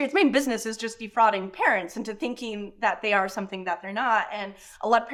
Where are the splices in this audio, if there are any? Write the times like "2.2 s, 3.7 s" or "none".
none